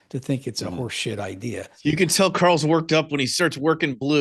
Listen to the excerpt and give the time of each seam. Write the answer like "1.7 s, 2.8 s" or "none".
1.7 s